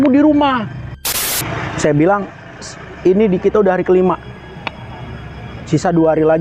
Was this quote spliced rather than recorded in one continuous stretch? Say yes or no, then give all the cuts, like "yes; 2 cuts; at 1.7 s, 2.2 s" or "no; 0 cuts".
yes; 1 cut; at 1.2 s